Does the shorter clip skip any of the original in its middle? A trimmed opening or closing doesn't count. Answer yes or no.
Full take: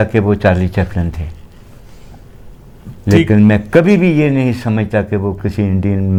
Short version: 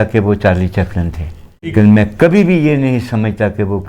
yes